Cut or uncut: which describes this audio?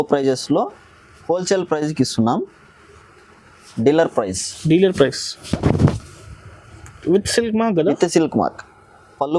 uncut